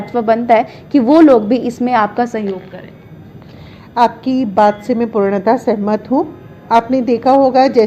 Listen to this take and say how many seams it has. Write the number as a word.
zero